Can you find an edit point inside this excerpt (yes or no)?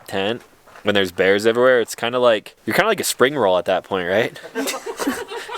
yes